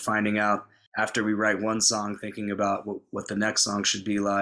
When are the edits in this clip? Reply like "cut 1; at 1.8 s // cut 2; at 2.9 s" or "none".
none